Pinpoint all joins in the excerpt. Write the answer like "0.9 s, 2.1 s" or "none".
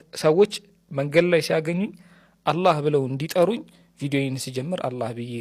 none